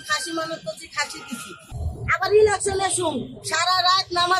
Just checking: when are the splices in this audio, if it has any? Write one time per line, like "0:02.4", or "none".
0:01.8